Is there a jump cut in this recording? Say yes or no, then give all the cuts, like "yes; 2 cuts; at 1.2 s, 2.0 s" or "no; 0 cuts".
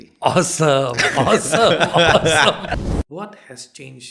yes; 1 cut; at 2.8 s